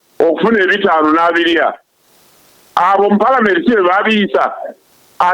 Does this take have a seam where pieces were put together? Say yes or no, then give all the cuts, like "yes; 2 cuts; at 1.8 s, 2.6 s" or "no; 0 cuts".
no; 0 cuts